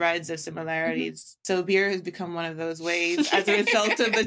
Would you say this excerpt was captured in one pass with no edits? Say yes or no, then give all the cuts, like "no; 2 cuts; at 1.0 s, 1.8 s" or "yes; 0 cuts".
yes; 0 cuts